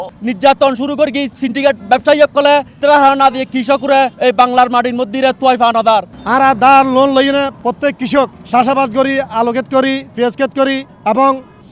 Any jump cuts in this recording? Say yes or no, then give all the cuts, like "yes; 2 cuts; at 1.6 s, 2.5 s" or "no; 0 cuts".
yes; 6 cuts; at 1.3 s, 2.7 s, 4.1 s, 6.2 s, 7.6 s, 8.4 s